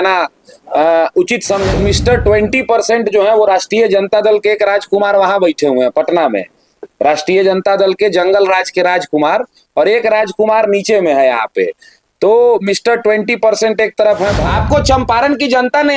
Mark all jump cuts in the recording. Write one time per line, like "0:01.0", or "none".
0:01.7
0:14.4